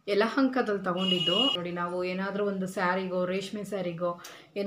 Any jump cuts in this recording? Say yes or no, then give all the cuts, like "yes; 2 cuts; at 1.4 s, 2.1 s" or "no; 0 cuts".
yes; 1 cut; at 1.6 s